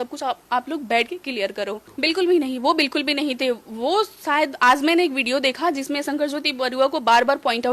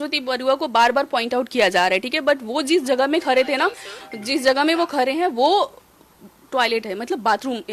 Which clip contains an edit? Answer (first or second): first